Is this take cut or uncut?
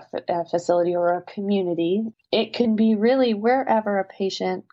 cut